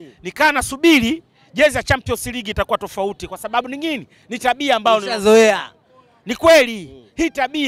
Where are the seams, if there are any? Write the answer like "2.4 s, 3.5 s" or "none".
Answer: none